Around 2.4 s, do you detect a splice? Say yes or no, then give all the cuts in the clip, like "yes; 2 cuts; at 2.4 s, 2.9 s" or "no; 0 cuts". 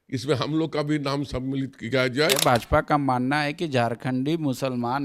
yes; 1 cut; at 2.4 s